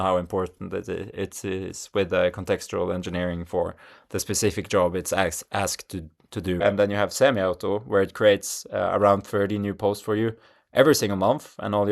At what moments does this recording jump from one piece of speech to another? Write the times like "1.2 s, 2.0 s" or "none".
6.6 s